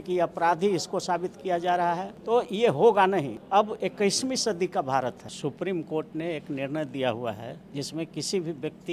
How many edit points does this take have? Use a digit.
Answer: 4